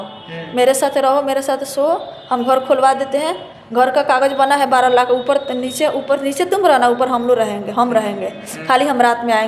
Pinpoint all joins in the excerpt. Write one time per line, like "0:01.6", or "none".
none

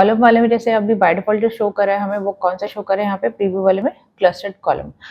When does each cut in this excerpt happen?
none

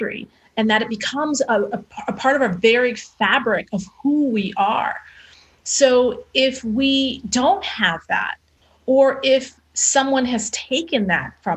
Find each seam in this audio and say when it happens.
0:01.9

